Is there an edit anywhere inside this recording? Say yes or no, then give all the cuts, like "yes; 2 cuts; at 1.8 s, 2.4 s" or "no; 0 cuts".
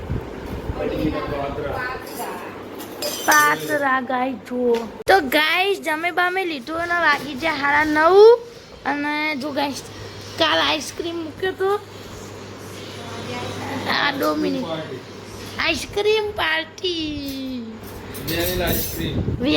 yes; 1 cut; at 4.9 s